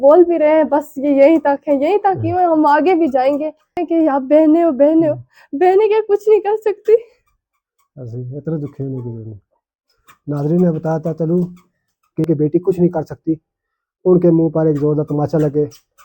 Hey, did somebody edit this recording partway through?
yes; 2 cuts; at 3.8 s, 12.3 s

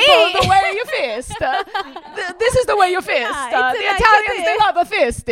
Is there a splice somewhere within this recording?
no; 0 cuts

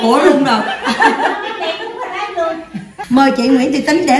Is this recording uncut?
no; 1 cut; at 3.0 s

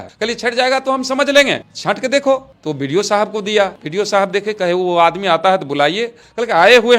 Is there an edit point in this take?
yes; 1 cut; at 3.8 s

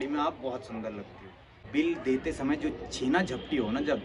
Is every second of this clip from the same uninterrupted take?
no; 1 cut; at 1.6 s

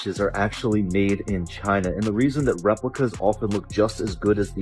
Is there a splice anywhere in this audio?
no; 0 cuts

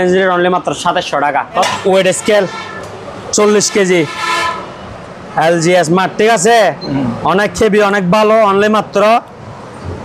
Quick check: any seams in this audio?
yes; 1 cut; at 1.6 s

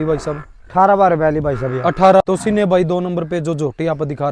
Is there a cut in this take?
yes; 1 cut; at 2.2 s

